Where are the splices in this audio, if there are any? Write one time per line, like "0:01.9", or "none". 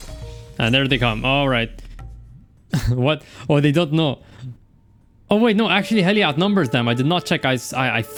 none